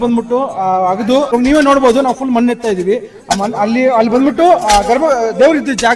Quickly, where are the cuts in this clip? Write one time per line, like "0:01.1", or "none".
0:01.3